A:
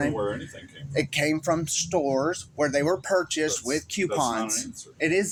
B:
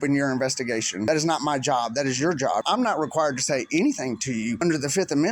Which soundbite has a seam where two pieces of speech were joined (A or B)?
B